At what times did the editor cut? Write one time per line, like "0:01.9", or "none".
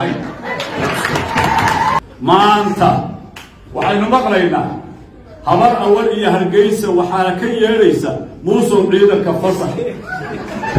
0:02.0